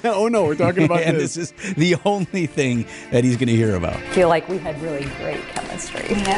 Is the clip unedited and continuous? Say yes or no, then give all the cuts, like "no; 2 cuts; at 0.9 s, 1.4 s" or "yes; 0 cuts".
yes; 0 cuts